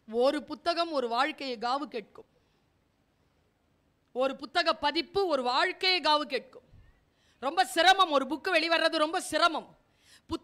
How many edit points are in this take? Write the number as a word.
zero